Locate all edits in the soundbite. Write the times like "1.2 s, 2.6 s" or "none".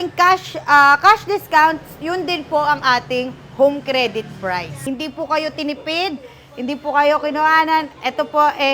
4.8 s